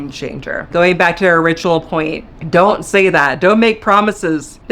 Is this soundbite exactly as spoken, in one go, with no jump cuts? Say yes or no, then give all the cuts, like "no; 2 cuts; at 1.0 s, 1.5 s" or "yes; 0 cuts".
no; 1 cut; at 2.4 s